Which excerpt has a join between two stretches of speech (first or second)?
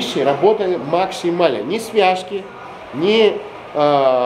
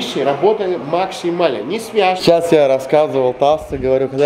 second